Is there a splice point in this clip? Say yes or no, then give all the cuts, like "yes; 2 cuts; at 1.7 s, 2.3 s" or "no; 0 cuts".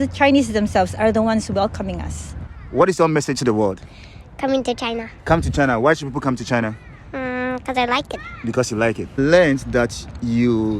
yes; 2 cuts; at 2.5 s, 9.0 s